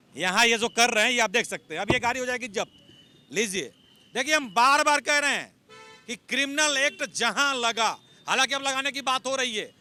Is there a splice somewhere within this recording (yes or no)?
no